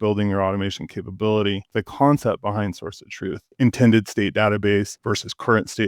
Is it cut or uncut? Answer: cut